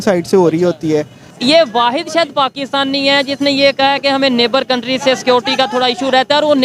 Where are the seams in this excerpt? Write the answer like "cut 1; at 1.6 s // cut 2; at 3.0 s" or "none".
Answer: cut 1; at 1.2 s